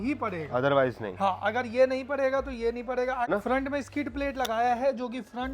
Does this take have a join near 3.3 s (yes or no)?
yes